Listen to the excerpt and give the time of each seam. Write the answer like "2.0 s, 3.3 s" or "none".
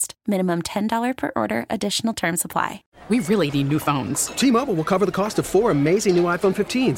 2.9 s